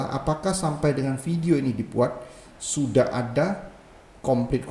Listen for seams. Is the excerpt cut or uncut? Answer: uncut